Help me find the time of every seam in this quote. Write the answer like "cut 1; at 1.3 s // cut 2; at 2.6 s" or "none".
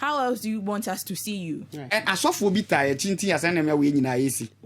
cut 1; at 1.8 s